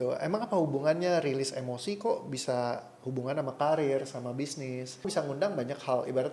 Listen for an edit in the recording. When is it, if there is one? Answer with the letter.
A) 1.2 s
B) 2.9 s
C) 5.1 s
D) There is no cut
C